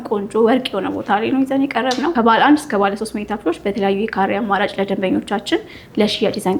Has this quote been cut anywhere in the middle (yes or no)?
yes